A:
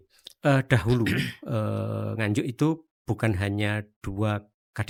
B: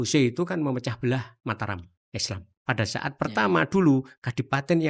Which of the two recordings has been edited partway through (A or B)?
B